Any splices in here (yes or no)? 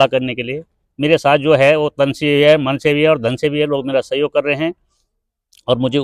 no